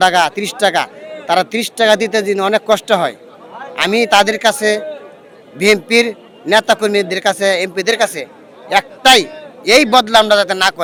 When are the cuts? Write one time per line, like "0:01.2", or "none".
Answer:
none